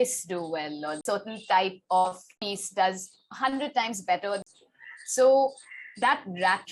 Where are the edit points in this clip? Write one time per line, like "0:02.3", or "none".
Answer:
0:01.0
0:02.3
0:04.4